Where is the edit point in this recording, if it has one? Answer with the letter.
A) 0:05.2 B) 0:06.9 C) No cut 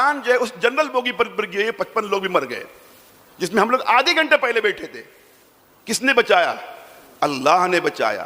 C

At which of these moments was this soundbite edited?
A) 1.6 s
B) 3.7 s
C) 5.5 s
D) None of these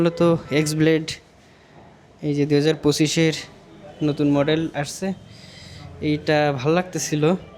D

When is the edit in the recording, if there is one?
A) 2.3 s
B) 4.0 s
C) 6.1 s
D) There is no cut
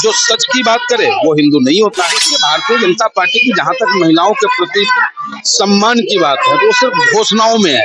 A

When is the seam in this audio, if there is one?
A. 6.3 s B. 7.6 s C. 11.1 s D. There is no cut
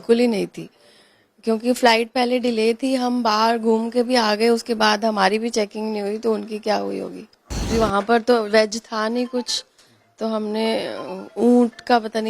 B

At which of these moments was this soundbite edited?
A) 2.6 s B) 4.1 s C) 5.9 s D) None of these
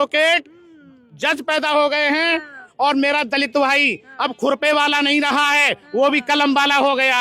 A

